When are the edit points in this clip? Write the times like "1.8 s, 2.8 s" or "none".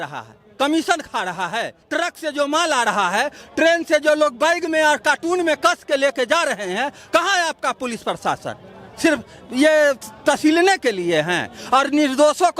1.8 s